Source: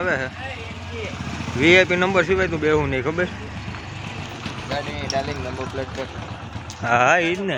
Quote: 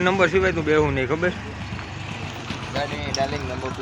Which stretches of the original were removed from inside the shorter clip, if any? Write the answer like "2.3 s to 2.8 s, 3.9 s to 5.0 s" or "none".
none